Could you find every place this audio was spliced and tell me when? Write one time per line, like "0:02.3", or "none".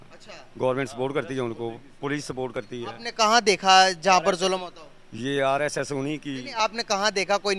none